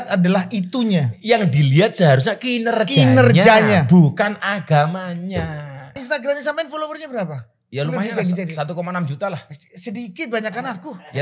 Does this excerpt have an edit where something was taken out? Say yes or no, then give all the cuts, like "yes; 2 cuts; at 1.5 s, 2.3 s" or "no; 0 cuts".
yes; 1 cut; at 6.0 s